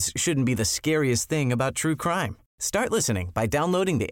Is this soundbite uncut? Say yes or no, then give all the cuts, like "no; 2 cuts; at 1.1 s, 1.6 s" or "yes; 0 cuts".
yes; 0 cuts